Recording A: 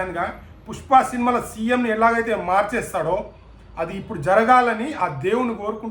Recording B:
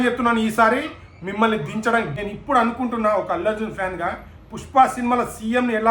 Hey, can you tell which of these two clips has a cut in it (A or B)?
B